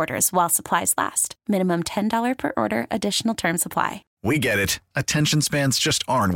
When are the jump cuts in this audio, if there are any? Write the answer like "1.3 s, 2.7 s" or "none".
4.1 s